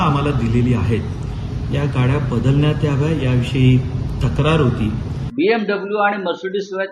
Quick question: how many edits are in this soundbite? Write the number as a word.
one